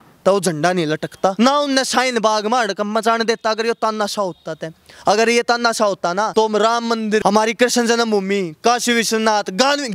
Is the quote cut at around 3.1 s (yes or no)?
no